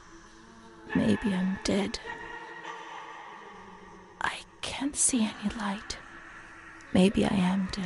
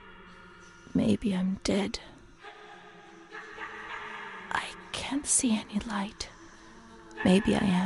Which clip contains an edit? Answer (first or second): first